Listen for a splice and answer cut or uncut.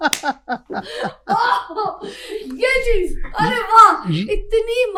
uncut